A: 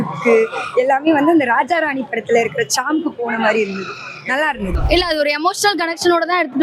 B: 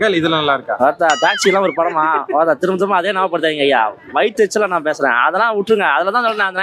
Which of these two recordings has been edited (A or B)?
A